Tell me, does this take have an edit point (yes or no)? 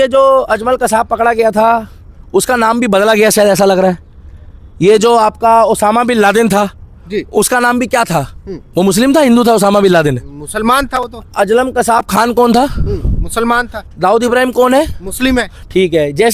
no